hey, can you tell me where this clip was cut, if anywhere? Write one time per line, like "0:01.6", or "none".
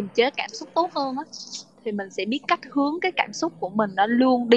none